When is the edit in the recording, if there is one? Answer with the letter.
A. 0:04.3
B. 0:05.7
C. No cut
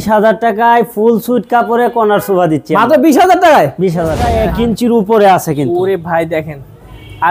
A